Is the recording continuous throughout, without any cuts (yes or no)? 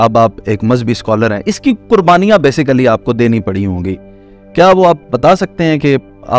yes